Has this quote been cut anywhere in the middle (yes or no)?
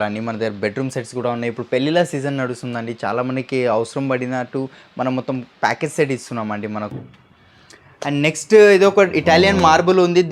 yes